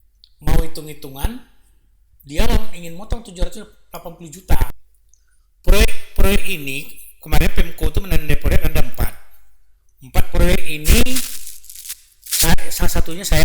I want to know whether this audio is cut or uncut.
cut